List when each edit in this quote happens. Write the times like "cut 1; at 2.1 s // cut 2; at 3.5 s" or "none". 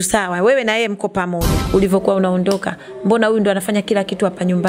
cut 1; at 1.6 s